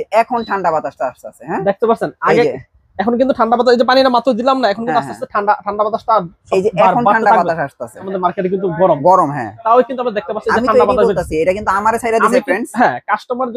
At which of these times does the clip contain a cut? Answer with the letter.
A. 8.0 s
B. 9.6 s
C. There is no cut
A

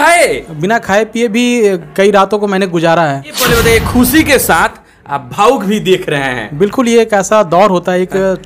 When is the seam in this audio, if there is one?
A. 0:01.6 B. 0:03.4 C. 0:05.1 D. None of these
B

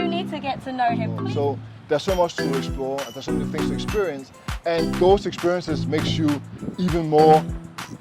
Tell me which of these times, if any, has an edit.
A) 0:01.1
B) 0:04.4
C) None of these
A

